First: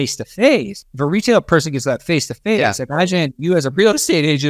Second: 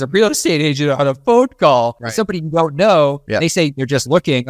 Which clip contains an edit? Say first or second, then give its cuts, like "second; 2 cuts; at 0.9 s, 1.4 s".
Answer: second; 2 cuts; at 2.0 s, 3.2 s